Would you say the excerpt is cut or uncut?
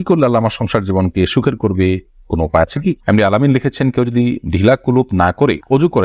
cut